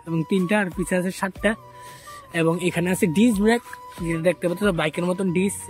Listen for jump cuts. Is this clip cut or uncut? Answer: uncut